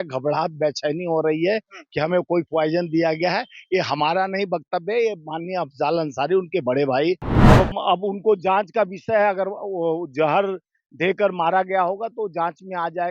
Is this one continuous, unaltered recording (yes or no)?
no